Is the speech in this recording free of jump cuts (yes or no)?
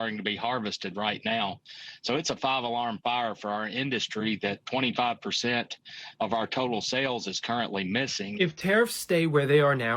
no